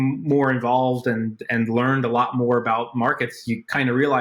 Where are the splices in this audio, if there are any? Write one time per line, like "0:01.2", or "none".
none